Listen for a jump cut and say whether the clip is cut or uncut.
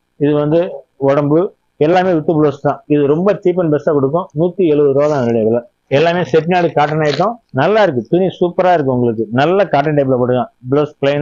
cut